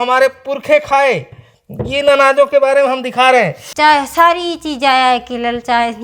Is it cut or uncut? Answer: cut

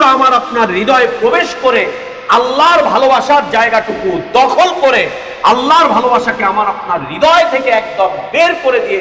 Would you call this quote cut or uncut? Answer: uncut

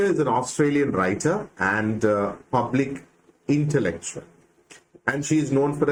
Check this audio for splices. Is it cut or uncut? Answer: uncut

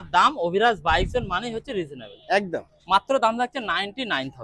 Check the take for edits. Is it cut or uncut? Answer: uncut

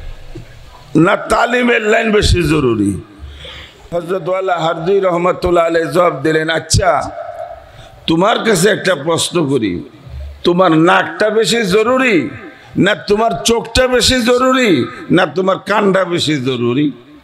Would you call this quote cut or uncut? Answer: cut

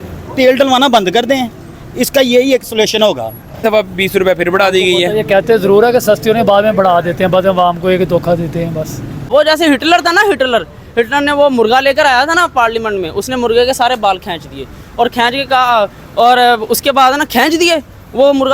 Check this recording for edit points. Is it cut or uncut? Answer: cut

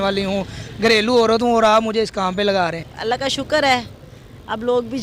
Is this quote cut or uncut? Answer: cut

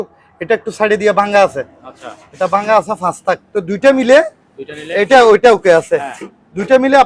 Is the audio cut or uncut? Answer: uncut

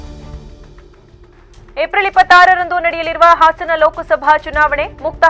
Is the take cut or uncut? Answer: uncut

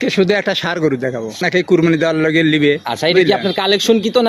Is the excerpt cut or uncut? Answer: cut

